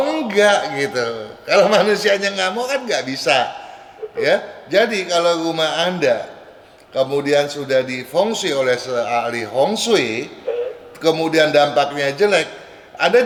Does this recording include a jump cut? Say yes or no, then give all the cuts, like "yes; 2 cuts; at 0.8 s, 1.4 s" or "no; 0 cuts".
no; 0 cuts